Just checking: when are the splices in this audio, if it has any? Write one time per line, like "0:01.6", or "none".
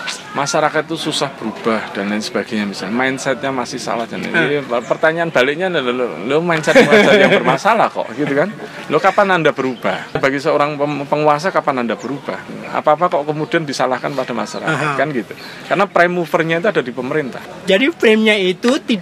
0:10.1
0:12.4
0:17.5